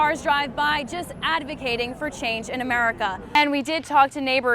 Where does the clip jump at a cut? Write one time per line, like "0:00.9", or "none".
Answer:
0:03.3